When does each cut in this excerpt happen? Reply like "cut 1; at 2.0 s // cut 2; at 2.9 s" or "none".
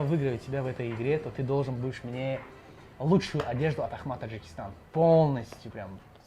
none